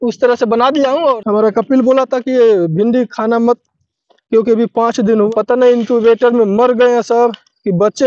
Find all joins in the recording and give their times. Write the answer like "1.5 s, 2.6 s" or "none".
1.0 s, 5.1 s